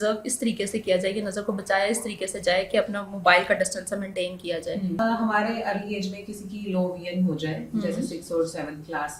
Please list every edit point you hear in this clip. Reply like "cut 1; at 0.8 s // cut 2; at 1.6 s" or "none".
cut 1; at 5.0 s